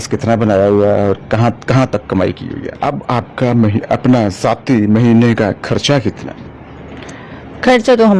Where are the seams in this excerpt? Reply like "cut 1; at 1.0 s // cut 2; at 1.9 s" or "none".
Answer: cut 1; at 2.8 s